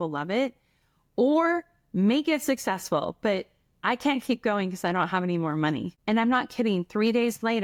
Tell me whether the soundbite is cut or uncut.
uncut